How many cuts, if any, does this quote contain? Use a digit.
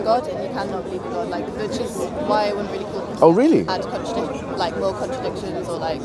1